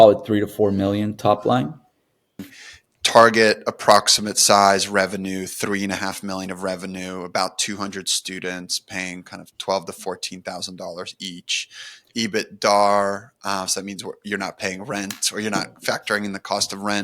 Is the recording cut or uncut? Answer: cut